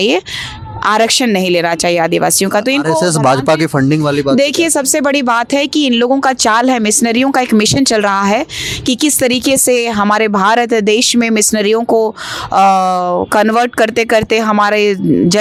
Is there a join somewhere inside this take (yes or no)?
no